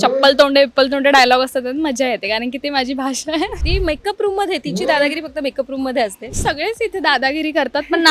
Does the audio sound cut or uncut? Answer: cut